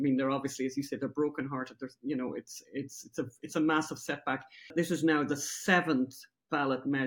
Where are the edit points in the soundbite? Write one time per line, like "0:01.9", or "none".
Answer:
0:04.7